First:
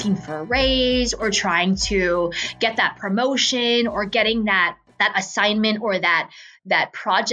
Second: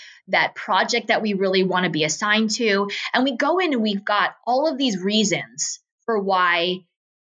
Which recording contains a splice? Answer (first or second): first